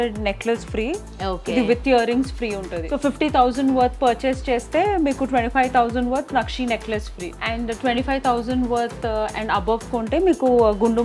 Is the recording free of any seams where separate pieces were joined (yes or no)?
no